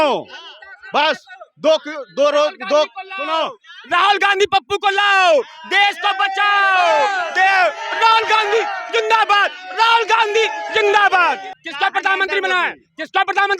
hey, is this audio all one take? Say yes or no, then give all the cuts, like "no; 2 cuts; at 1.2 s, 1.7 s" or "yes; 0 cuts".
yes; 0 cuts